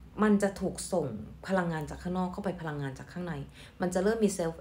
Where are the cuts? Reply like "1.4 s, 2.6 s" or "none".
none